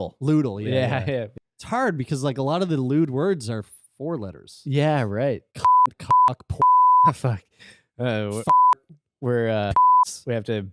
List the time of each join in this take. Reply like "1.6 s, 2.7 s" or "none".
1.3 s